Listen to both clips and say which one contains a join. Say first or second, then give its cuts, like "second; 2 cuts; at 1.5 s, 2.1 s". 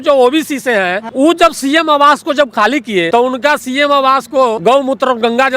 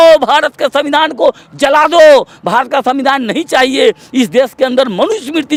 first; 3 cuts; at 1.0 s, 3.1 s, 4.6 s